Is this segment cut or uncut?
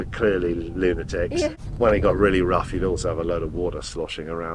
cut